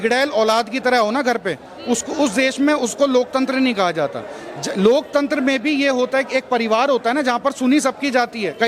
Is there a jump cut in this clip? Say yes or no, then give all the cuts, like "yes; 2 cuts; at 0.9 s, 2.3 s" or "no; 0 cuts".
no; 0 cuts